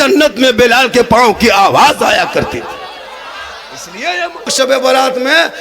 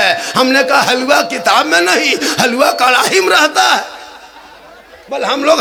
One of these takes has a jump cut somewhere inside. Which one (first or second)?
first